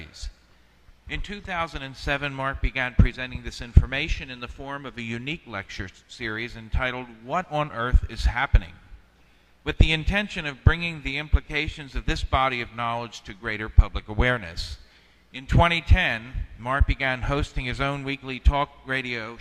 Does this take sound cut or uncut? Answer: uncut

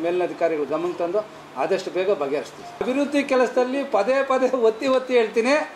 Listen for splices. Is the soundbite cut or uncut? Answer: cut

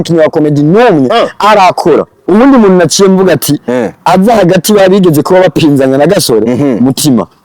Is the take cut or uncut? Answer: cut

